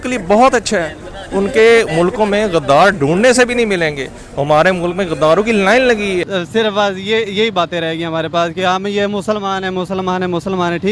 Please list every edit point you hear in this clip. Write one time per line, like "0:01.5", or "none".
0:06.3